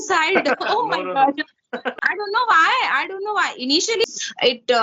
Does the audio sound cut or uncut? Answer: cut